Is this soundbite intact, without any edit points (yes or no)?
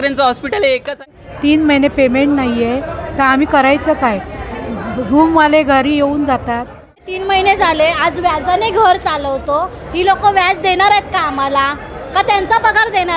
no